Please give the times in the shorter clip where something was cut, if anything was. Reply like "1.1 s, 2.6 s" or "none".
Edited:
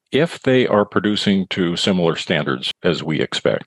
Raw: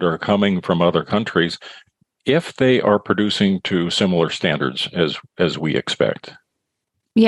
2.7 s